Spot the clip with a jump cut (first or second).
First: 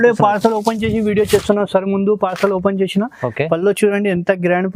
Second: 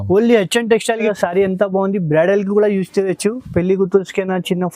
second